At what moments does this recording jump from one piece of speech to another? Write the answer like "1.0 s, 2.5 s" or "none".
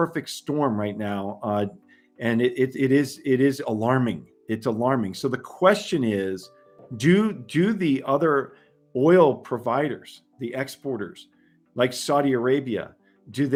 none